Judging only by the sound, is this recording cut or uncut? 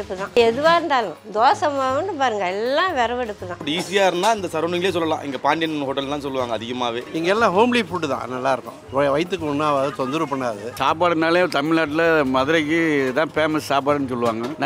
cut